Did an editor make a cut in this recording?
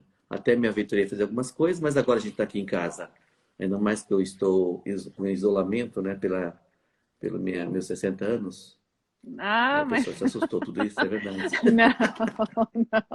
no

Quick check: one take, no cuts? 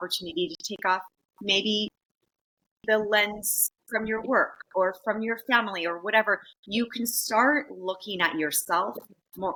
yes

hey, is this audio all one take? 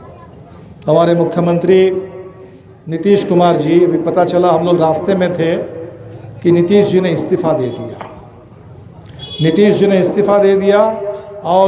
yes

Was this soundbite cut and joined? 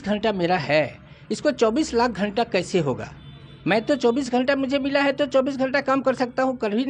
no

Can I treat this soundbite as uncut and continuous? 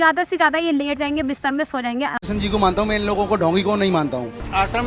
no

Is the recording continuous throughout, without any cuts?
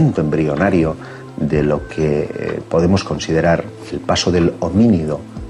yes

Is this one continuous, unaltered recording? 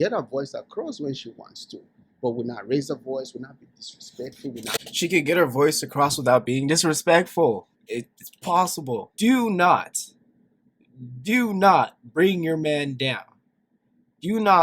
no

